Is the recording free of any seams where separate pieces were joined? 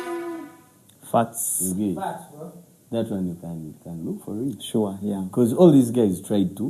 yes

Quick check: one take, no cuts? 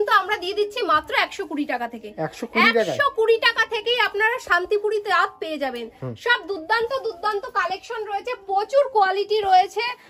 yes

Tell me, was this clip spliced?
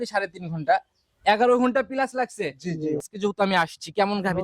yes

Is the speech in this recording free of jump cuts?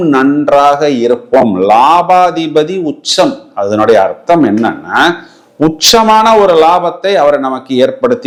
yes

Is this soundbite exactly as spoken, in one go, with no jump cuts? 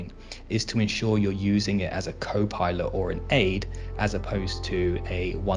yes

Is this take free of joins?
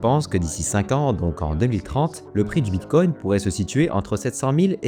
yes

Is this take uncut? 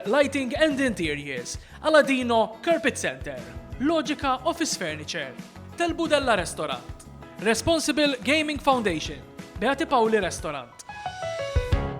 no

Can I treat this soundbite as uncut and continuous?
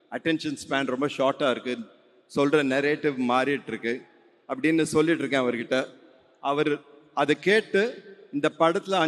yes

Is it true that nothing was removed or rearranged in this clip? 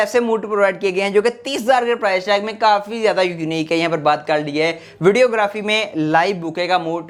yes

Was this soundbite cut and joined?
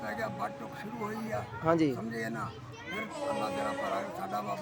no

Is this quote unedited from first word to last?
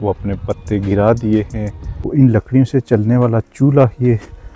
no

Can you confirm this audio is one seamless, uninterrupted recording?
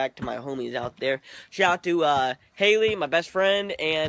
no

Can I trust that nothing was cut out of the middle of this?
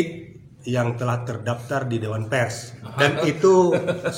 no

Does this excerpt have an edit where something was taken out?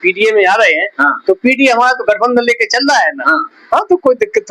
no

